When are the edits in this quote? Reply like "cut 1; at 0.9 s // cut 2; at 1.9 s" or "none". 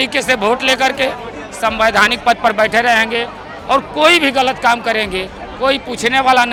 none